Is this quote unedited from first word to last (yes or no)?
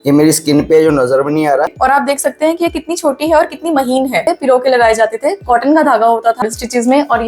no